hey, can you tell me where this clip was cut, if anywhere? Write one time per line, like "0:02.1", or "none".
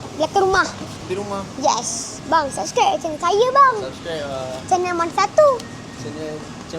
0:02.1
0:04.5

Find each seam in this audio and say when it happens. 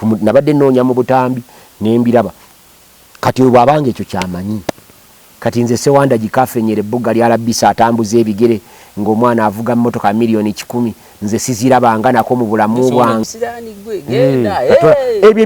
0:13.2

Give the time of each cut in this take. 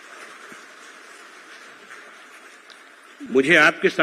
none

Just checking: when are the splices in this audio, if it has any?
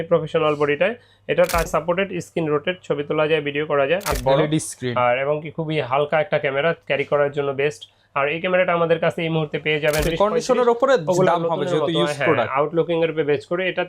0:01.7
0:04.2
0:10.0

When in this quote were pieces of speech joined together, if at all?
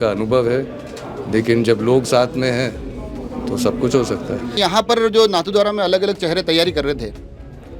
0:04.5

